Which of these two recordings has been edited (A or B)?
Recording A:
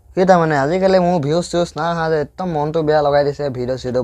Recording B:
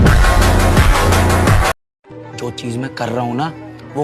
B